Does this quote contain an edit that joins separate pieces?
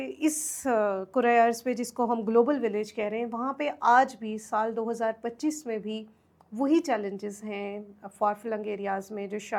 no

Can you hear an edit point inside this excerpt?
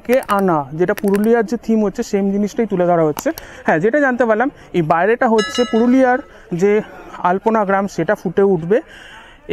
no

